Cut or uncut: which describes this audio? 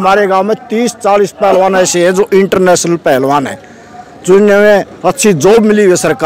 uncut